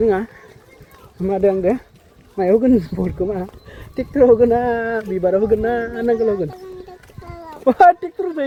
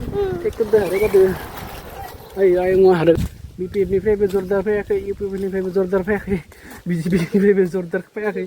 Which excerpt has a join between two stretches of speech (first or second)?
second